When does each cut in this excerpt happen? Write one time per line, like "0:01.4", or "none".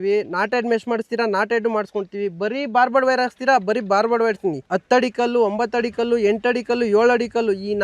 none